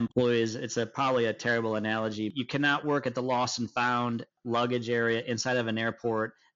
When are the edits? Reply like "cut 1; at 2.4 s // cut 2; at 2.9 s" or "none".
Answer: cut 1; at 2.3 s // cut 2; at 4.3 s